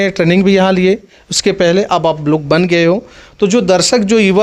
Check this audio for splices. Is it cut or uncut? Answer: uncut